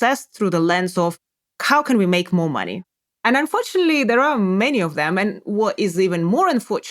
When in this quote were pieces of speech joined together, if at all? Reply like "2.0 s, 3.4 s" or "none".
2.8 s